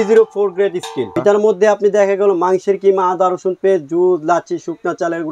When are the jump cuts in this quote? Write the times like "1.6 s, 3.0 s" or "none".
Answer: 1.1 s